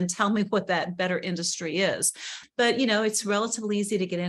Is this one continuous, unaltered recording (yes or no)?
no